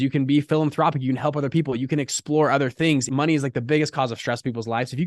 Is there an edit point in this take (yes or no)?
yes